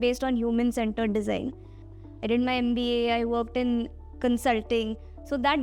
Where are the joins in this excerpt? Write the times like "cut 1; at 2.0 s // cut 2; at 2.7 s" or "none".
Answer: cut 1; at 1.9 s